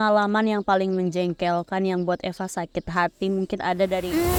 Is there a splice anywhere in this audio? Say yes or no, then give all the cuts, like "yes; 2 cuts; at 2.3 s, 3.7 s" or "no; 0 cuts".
no; 0 cuts